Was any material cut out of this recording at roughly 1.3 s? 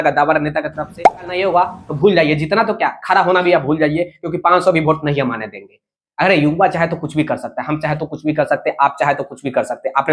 yes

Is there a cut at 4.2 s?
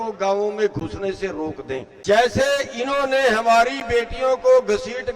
no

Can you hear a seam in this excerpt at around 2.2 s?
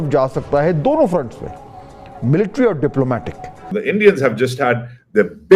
no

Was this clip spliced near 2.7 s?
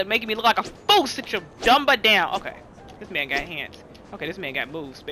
no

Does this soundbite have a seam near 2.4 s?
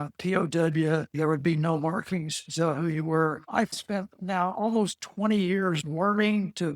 no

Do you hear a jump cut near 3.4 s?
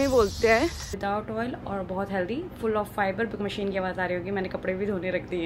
yes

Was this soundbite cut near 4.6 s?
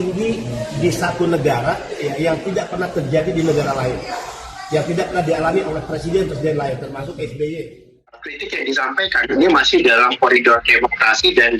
no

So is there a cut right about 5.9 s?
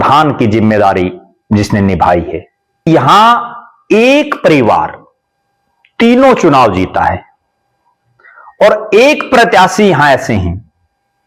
no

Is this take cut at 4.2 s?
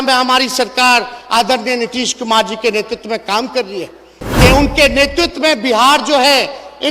yes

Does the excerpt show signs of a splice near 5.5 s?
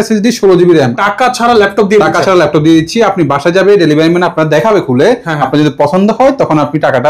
no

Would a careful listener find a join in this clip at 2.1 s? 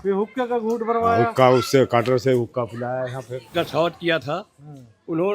no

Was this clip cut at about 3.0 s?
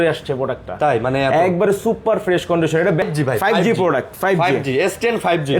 yes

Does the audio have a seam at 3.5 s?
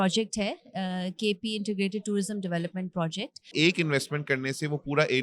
yes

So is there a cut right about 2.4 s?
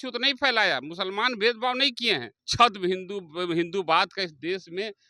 yes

